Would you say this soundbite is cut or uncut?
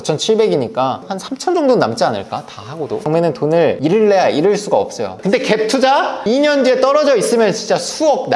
cut